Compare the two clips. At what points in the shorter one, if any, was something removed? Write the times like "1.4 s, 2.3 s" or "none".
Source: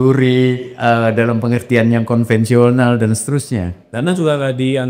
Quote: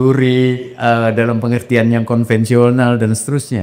none